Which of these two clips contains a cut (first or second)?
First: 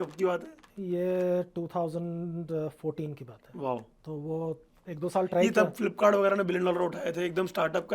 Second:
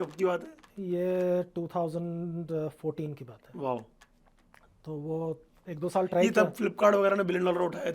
first